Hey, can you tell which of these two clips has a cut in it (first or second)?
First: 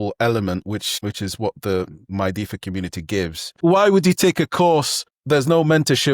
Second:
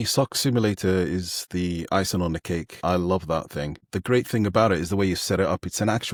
first